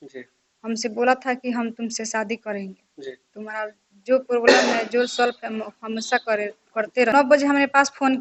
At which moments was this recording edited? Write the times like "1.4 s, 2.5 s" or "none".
7.1 s